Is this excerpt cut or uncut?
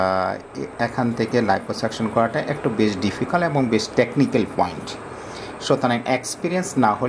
uncut